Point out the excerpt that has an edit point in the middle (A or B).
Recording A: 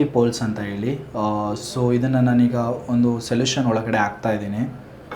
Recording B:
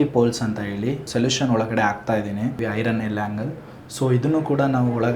B